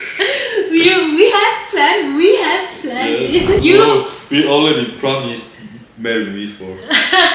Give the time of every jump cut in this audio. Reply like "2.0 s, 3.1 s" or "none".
3.6 s